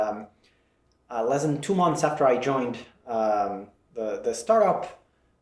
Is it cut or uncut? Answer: uncut